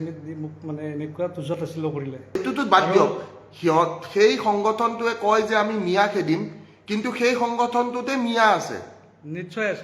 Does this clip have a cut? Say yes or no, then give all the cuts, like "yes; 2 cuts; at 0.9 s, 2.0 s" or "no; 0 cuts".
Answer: yes; 1 cut; at 2.4 s